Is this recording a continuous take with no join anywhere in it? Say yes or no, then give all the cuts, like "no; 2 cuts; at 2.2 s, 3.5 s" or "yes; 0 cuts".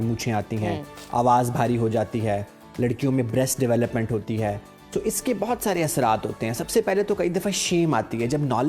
yes; 0 cuts